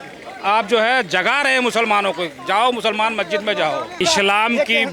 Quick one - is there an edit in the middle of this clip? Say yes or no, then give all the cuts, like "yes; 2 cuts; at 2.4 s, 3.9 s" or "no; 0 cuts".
yes; 1 cut; at 4.0 s